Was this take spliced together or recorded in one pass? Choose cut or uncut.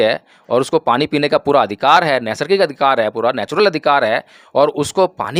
uncut